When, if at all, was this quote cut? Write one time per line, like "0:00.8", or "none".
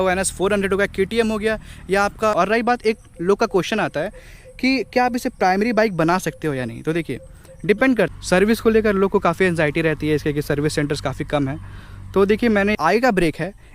0:02.3
0:08.1
0:12.8